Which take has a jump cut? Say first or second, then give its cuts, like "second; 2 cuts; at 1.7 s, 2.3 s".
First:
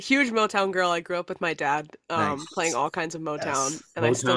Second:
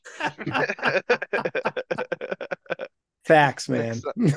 second; 1 cut; at 2.9 s